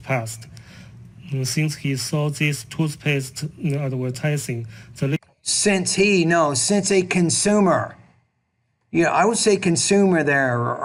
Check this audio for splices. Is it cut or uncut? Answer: uncut